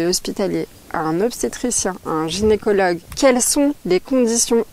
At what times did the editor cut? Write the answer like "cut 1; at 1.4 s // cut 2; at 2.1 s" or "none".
cut 1; at 3.1 s